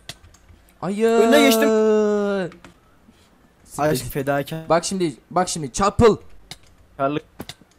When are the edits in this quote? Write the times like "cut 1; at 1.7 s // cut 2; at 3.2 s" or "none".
none